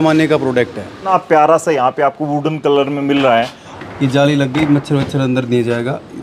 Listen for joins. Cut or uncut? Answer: cut